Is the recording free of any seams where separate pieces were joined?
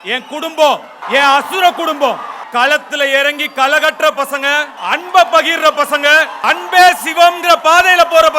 no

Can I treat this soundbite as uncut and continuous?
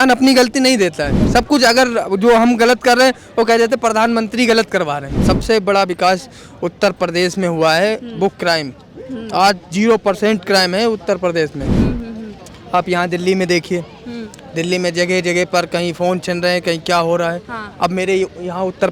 no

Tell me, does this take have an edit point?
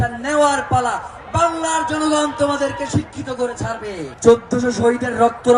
no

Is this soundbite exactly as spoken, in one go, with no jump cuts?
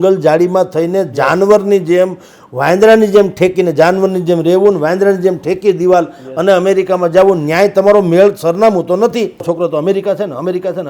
no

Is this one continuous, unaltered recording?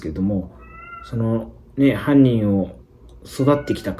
yes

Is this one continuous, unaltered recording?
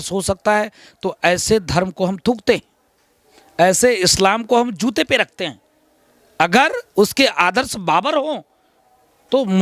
yes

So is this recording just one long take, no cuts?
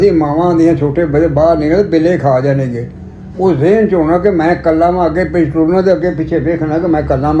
yes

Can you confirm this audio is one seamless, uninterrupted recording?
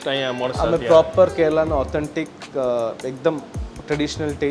yes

